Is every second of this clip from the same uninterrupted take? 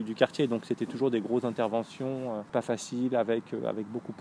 no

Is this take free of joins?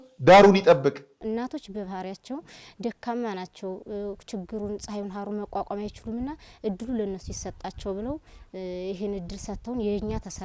no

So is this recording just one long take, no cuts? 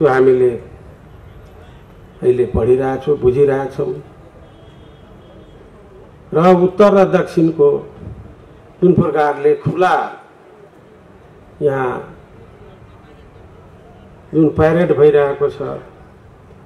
yes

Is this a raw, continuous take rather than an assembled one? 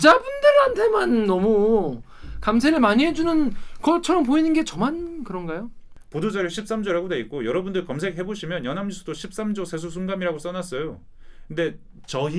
no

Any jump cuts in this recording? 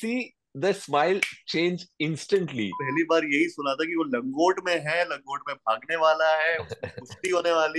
yes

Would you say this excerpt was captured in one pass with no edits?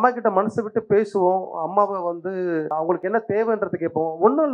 no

